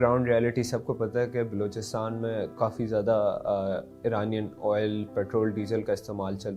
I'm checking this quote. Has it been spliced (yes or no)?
no